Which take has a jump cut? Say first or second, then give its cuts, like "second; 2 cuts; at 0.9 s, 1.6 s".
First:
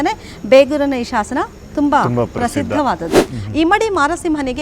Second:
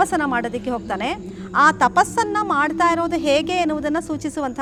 first; 1 cut; at 3.2 s